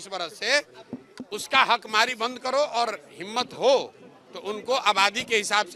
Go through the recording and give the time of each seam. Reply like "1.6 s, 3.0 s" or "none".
none